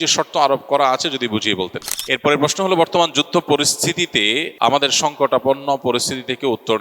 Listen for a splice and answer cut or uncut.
cut